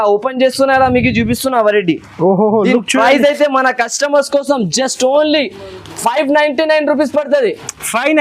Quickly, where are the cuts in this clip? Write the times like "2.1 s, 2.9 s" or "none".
none